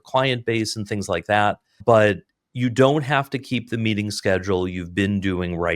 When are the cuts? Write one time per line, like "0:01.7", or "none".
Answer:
0:01.8